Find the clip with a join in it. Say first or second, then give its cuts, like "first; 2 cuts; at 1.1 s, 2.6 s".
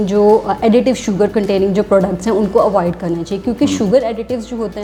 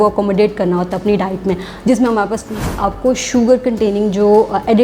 second; 1 cut; at 2.7 s